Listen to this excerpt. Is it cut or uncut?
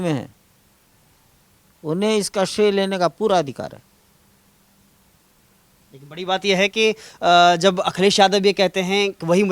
uncut